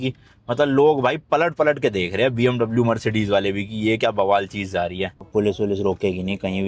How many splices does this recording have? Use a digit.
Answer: 1